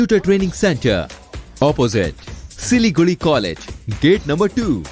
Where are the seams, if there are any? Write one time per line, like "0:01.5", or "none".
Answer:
none